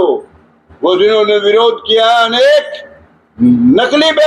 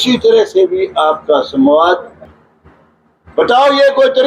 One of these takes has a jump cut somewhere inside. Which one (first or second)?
second